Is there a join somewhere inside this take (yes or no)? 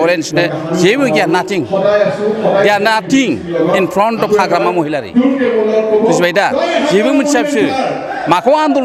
no